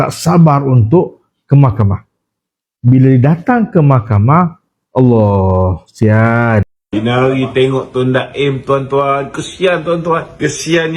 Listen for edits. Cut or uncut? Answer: cut